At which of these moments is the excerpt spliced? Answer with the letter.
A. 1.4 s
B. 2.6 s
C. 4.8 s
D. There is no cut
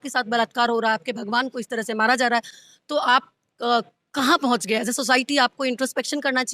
D